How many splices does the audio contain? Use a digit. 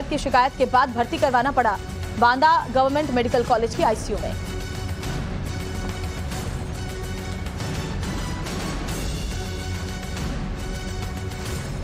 1